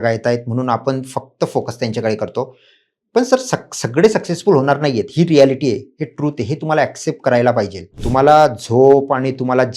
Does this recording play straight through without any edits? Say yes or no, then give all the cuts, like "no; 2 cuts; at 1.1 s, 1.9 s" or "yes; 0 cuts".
no; 1 cut; at 7.9 s